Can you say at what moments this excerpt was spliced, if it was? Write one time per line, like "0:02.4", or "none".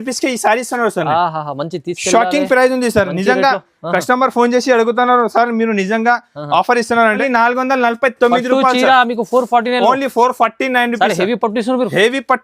0:07.2